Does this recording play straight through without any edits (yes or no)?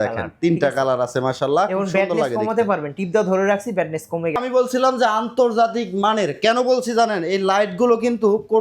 no